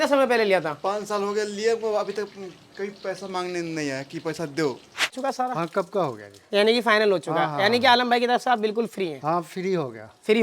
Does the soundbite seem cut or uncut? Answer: cut